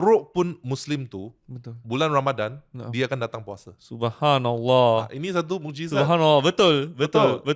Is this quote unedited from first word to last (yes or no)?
yes